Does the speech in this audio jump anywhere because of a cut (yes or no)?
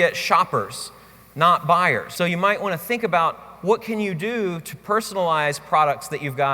yes